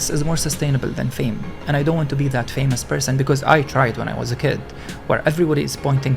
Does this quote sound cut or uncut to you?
uncut